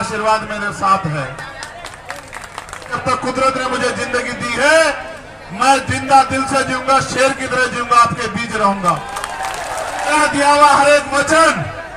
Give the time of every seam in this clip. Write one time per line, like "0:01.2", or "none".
0:03.0
0:10.1